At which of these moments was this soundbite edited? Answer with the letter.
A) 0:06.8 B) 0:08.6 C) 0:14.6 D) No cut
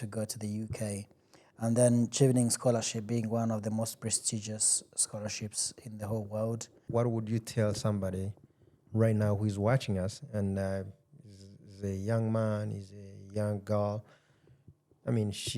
A